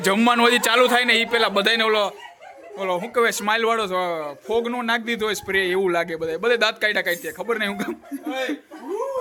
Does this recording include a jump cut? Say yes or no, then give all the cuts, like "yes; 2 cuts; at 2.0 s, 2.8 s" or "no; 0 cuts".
no; 0 cuts